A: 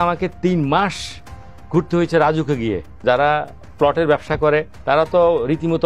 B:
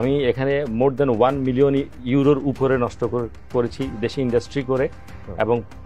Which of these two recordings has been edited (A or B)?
A